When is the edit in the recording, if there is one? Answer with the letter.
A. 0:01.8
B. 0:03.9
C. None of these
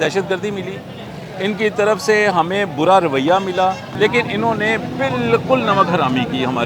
B